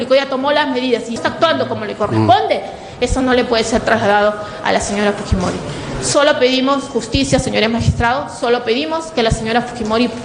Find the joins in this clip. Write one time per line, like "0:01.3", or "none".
0:01.2